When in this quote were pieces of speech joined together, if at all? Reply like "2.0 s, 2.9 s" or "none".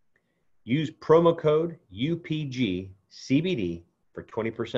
none